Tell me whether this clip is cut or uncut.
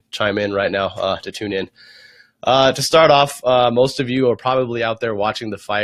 uncut